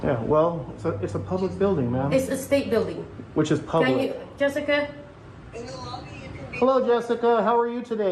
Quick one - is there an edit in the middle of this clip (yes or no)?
no